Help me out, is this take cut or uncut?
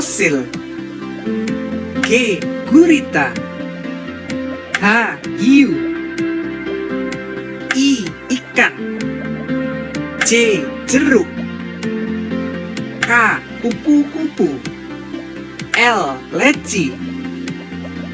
uncut